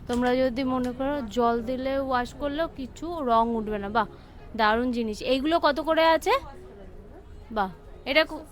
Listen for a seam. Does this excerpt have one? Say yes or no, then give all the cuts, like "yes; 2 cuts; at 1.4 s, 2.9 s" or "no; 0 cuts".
no; 0 cuts